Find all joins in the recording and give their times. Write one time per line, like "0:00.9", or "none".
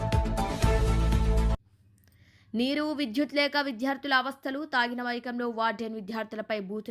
0:01.5